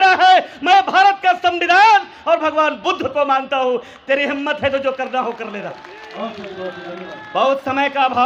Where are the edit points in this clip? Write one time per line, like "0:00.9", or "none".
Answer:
none